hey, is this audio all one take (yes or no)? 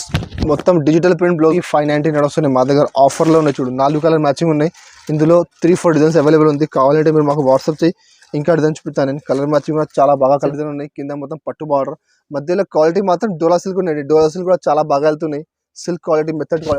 no